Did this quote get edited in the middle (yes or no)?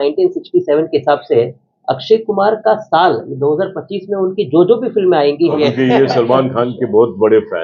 yes